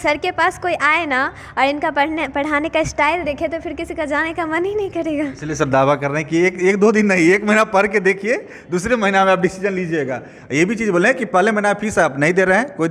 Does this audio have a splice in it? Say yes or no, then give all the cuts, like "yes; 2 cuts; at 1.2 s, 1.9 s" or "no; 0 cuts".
no; 0 cuts